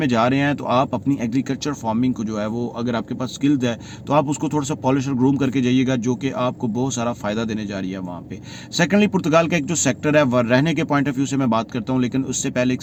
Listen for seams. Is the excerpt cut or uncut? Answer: uncut